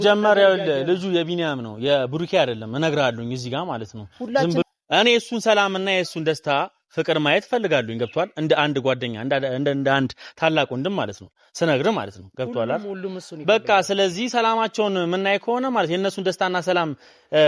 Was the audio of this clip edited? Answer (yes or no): yes